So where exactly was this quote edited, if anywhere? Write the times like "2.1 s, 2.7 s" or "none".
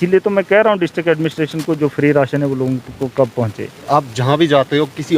3.8 s